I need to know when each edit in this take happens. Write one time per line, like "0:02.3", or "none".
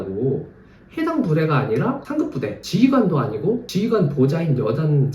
0:02.2
0:03.7

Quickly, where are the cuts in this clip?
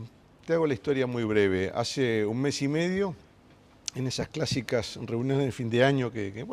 0:03.9

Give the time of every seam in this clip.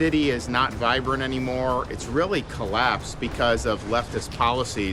none

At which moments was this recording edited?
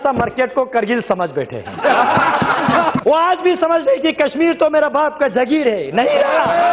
0:03.0
0:05.7

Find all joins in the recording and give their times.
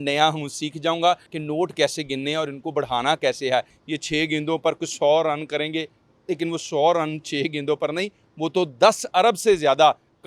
0:01.3
0:03.8

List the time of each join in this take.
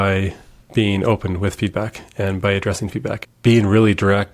0:03.2

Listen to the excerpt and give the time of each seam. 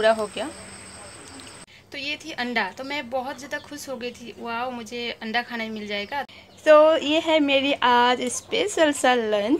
0:01.4
0:06.3

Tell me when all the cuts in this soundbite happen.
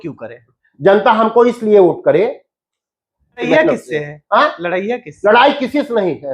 0:03.5

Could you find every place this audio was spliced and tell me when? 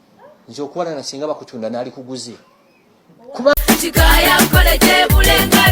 0:03.6

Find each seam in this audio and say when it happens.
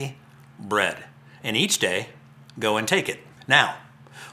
0:03.3

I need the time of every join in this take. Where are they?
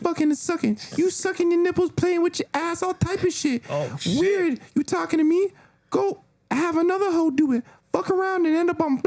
none

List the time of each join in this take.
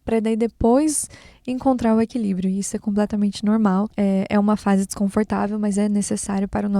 0:03.9

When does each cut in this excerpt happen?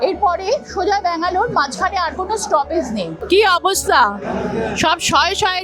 0:03.2

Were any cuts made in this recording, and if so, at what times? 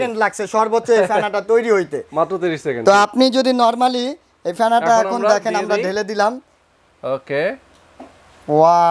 none

